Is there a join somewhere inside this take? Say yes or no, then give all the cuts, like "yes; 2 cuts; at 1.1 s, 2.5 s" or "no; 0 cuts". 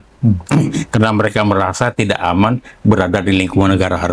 no; 0 cuts